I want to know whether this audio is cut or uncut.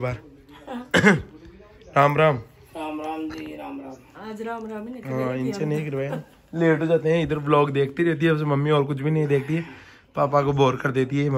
uncut